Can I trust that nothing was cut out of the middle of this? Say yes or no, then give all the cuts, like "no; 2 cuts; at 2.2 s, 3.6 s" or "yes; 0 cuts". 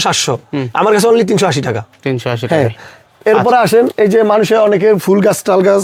yes; 0 cuts